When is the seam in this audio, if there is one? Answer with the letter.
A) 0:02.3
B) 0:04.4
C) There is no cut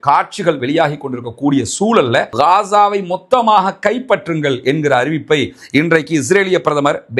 A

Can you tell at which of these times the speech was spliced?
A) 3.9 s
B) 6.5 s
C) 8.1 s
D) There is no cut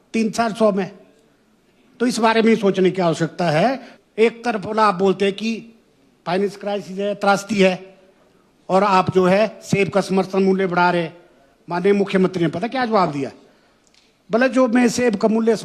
A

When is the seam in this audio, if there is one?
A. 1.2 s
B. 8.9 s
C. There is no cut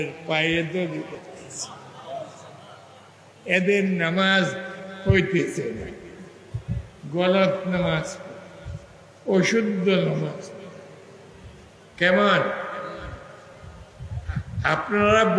A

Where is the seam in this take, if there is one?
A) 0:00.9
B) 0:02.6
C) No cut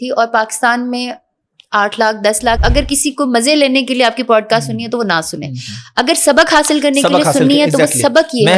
B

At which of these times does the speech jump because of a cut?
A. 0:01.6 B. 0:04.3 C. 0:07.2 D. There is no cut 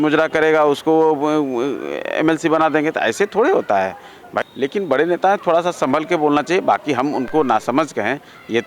B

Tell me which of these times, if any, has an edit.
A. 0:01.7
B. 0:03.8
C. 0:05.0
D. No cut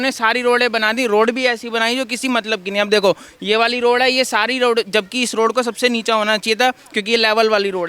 D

